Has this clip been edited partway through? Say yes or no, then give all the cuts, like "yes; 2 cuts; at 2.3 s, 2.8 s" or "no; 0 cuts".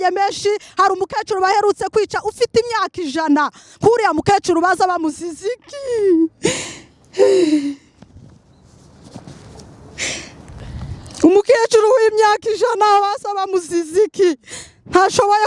no; 0 cuts